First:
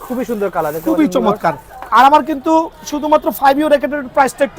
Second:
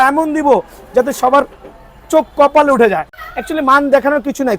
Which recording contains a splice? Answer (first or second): second